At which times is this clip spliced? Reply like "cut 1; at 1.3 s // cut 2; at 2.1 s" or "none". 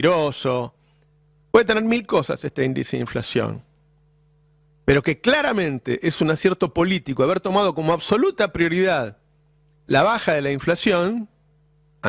none